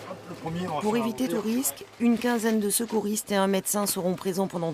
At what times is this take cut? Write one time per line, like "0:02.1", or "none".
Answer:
0:02.2

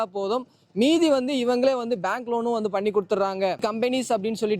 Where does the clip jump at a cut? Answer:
0:03.6

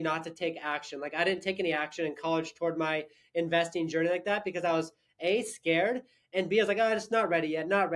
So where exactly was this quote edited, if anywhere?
none

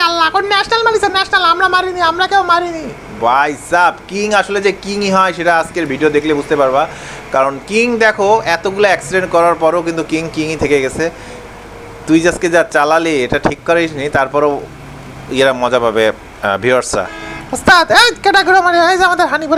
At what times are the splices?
none

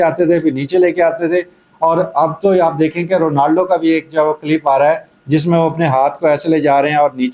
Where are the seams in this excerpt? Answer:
none

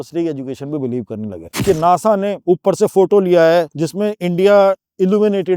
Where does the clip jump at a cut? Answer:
0:01.4
0:02.4
0:03.8

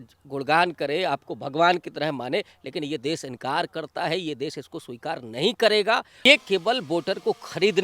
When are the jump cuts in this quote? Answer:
0:06.1

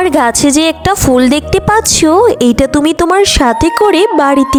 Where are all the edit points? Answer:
none

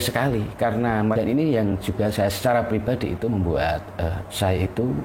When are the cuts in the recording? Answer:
0:01.1

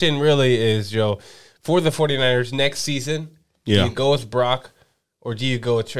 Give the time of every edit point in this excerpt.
none

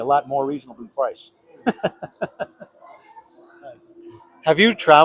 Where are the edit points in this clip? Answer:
none

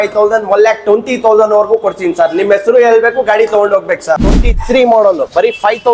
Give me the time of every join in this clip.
0:04.4

